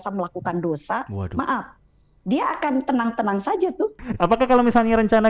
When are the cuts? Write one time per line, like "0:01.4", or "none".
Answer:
0:04.0